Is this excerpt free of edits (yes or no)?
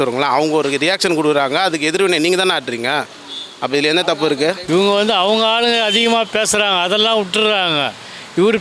no